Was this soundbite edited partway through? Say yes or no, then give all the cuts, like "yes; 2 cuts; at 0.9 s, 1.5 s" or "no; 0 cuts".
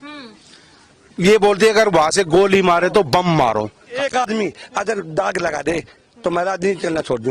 yes; 1 cut; at 4.2 s